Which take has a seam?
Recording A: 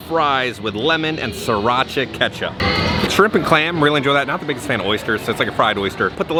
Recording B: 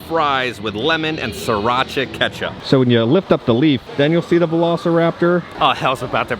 B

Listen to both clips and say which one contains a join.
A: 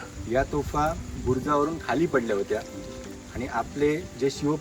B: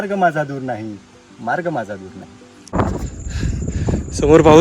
B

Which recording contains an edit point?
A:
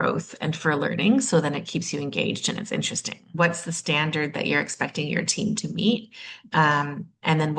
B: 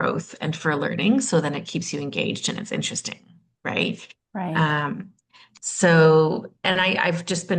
A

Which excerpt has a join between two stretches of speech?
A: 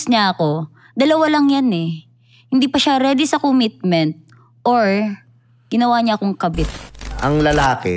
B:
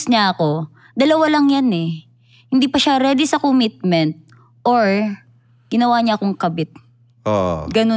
A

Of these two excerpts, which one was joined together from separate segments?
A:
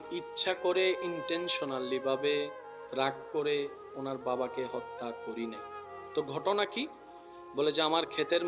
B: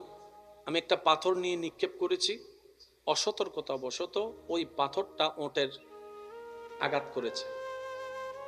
B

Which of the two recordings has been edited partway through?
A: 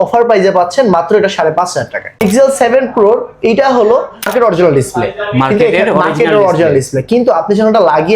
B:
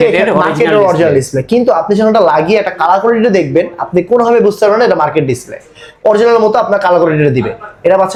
A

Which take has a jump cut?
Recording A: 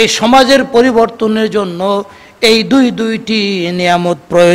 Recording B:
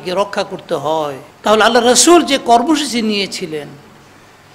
B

